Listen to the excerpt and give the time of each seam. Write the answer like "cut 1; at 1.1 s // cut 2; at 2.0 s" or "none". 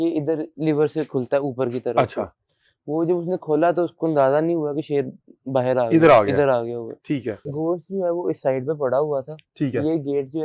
cut 1; at 7.4 s